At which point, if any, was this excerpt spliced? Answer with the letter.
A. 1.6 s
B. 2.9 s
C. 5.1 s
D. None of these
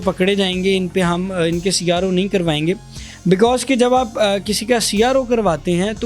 D